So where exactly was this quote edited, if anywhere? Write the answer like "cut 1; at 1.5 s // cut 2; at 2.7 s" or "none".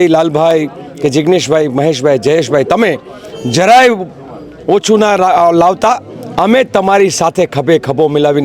none

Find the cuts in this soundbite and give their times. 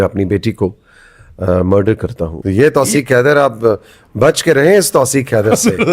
cut 1; at 2.3 s

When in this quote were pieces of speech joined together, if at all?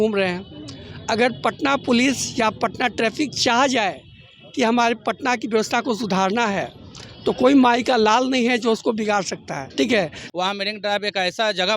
cut 1; at 10.2 s

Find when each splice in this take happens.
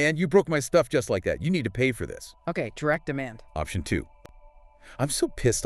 cut 1; at 4.1 s

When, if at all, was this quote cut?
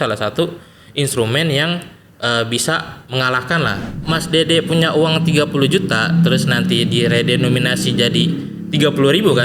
cut 1; at 3.9 s

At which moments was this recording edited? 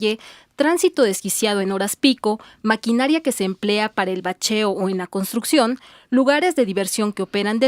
cut 1; at 6.6 s

